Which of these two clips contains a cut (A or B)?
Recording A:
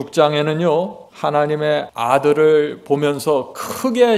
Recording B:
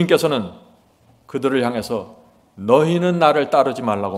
A